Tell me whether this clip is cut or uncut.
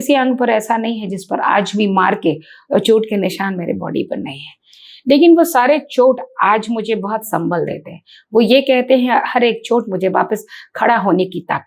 uncut